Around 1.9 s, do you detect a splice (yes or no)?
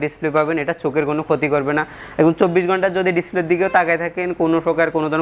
no